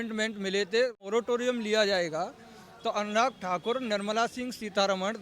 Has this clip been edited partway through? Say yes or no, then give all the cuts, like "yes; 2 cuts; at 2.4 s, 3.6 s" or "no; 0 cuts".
yes; 1 cut; at 1.0 s